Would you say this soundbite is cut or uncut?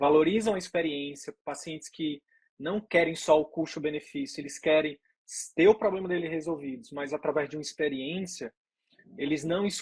uncut